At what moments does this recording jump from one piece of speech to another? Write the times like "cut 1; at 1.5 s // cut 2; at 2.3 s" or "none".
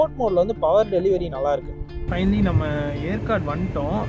cut 1; at 2.0 s